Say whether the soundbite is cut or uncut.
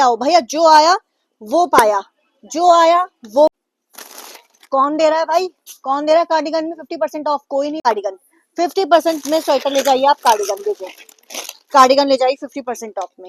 cut